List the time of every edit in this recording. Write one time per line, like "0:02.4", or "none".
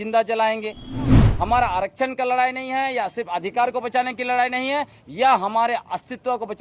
0:01.2